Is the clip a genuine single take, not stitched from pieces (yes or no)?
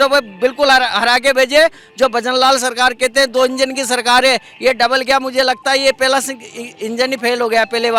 yes